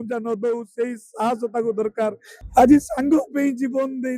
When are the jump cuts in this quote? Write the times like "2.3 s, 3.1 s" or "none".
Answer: 2.3 s